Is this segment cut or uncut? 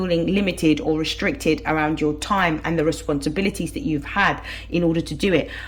uncut